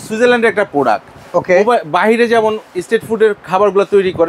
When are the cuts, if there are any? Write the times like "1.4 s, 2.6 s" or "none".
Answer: none